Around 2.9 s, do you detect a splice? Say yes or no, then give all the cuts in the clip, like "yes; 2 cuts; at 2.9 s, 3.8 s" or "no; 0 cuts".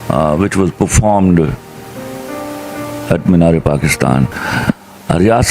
no; 1 cut; at 4.4 s